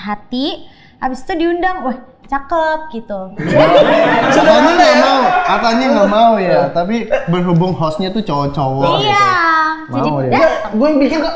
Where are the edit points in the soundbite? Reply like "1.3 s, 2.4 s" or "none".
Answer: none